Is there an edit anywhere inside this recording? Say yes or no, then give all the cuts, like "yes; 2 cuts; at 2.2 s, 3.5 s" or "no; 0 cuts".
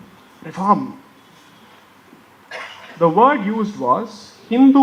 no; 0 cuts